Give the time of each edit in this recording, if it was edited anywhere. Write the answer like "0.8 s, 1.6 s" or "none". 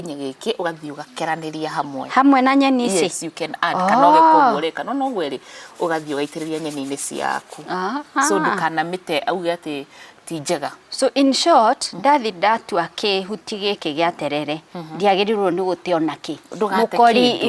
none